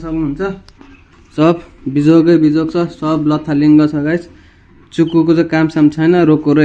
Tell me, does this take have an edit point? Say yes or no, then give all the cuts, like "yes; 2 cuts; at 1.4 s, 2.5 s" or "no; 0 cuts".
no; 0 cuts